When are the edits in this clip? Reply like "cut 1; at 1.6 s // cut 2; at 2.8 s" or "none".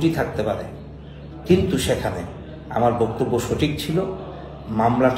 none